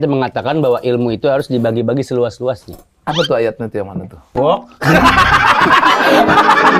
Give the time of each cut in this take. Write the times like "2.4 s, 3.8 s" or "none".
none